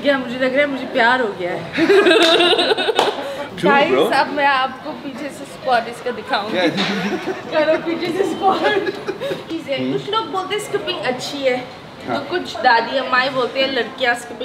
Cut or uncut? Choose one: cut